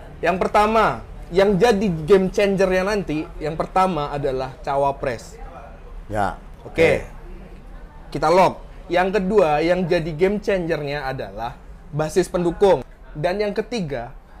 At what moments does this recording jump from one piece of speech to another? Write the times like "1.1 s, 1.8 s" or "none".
12.9 s